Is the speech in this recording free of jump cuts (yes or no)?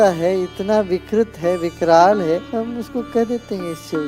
no